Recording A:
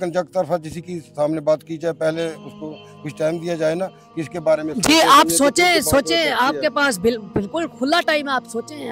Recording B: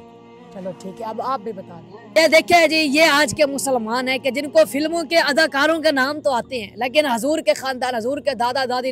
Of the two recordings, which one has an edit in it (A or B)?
B